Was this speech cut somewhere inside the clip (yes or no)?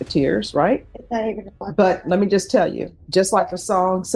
yes